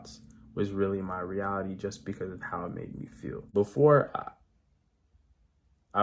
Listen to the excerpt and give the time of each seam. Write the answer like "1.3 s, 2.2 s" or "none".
3.4 s